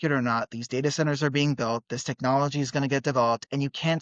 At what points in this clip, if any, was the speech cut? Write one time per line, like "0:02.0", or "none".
none